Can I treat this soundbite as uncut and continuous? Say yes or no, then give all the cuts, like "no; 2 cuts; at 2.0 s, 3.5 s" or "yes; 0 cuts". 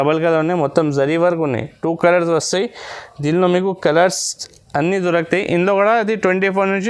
yes; 0 cuts